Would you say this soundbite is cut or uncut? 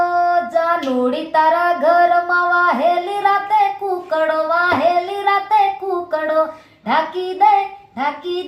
uncut